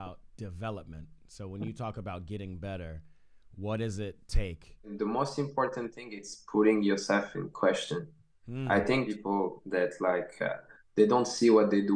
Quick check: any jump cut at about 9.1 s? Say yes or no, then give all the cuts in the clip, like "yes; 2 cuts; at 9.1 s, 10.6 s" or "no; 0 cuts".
yes; 2 cuts; at 4.9 s, 9.1 s